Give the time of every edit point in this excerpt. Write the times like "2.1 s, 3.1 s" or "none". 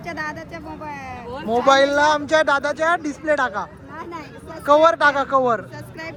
none